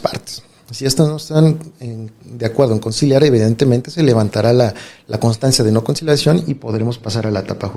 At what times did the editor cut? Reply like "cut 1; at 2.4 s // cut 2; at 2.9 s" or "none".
none